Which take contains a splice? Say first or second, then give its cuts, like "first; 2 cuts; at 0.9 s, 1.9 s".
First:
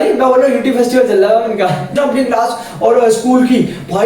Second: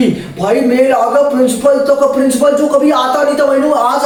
first; 1 cut; at 2.0 s